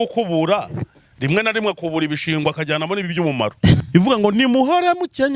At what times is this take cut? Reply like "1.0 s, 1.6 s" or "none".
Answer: 3.8 s